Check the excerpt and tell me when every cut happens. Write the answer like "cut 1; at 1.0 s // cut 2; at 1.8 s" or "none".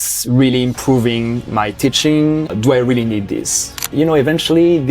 cut 1; at 2.5 s // cut 2; at 3.8 s